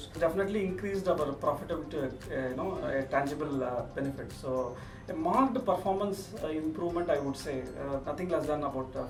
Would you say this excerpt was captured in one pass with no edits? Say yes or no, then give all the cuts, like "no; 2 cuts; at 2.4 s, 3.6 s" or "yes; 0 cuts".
yes; 0 cuts